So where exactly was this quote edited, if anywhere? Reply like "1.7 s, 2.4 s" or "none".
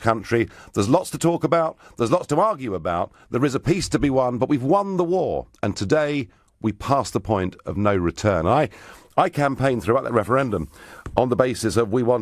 6.8 s